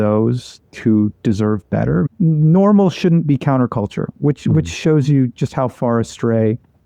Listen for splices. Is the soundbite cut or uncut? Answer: cut